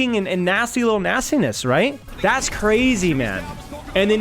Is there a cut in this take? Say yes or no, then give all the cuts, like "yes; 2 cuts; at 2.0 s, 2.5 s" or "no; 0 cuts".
yes; 1 cut; at 2.1 s